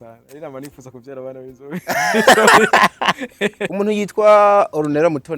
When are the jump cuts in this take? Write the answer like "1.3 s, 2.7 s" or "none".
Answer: 3.7 s